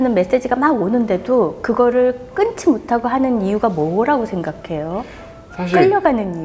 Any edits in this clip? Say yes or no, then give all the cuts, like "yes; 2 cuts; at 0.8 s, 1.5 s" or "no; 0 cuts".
no; 0 cuts